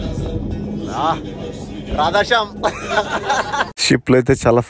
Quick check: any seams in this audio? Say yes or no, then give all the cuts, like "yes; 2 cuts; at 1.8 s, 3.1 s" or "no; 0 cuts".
yes; 1 cut; at 3.7 s